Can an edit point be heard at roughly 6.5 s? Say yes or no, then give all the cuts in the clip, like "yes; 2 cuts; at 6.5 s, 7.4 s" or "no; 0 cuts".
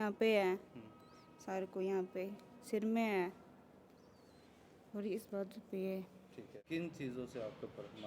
yes; 1 cut; at 6.5 s